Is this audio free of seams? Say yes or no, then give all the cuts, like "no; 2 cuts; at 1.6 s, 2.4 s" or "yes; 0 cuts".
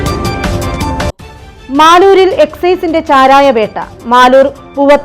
no; 1 cut; at 1.3 s